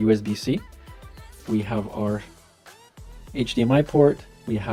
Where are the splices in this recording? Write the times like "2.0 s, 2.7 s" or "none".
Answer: none